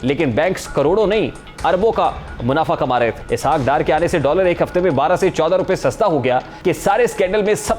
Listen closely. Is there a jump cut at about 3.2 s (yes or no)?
yes